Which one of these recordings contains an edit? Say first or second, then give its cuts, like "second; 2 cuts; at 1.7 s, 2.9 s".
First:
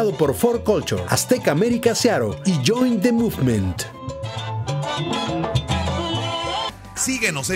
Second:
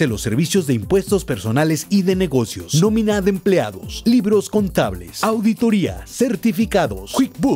first; 1 cut; at 6.6 s